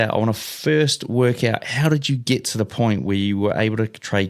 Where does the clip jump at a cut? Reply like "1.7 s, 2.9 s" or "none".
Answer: none